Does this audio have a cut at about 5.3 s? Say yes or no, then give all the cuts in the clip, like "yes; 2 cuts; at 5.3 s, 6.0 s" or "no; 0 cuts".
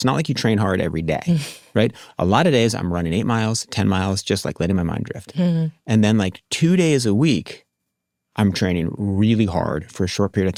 no; 0 cuts